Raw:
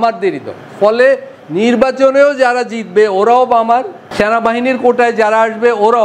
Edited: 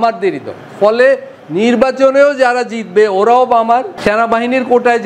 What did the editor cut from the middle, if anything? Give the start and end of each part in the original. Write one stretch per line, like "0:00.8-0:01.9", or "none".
0:03.9-0:04.1